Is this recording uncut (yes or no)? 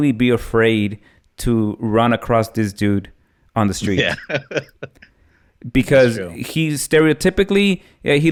yes